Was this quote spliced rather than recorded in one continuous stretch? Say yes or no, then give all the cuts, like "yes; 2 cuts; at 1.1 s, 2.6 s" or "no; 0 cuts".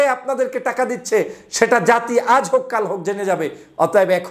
no; 0 cuts